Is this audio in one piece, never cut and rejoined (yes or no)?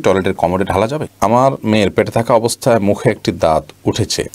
no